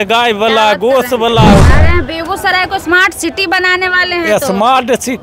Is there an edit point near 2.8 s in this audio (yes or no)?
no